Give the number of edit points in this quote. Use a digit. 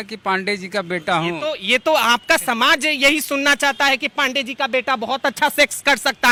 0